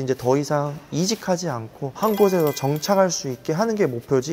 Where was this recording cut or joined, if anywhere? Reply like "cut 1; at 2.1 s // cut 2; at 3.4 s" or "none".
cut 1; at 1.8 s